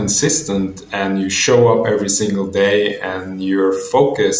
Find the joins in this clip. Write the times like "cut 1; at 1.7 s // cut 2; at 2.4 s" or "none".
none